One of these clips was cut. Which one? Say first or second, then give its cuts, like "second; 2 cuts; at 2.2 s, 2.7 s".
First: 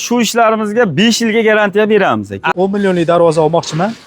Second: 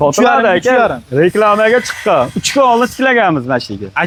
first; 1 cut; at 2.5 s